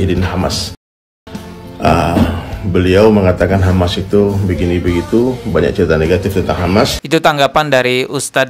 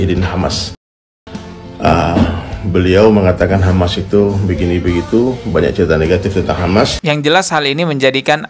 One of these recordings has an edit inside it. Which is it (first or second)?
second